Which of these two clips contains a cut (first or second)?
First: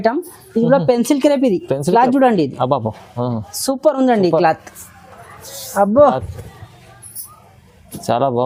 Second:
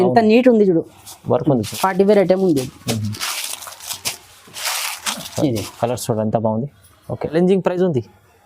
second